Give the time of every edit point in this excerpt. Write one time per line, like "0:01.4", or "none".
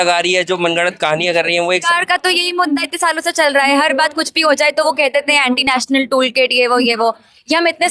0:01.8